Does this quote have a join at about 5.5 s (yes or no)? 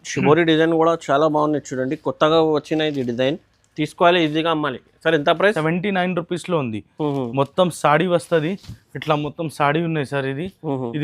yes